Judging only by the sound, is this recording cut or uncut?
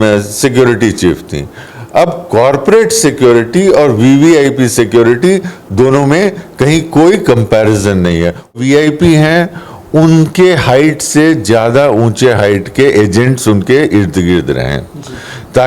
cut